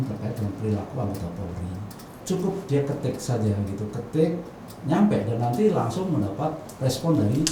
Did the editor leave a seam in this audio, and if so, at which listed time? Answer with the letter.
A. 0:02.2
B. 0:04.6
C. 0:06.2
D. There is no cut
A